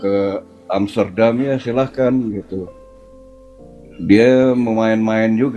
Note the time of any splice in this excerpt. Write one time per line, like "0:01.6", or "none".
none